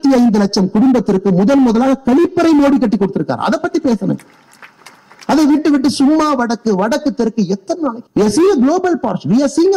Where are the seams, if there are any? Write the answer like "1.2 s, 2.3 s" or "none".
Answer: 8.0 s